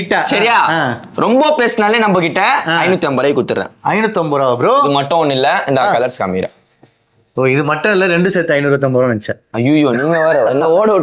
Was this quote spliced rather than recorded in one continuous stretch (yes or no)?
no